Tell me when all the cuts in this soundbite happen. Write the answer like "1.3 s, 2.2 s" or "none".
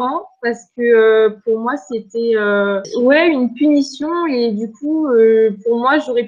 2.9 s